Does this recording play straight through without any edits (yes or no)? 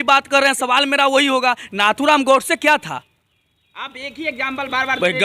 yes